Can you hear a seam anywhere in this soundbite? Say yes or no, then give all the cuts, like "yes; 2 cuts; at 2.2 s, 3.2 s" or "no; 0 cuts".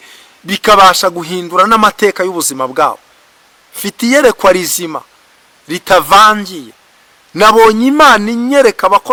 no; 0 cuts